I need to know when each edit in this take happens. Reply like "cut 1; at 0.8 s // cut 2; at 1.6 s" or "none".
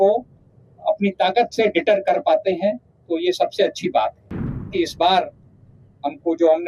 cut 1; at 4.7 s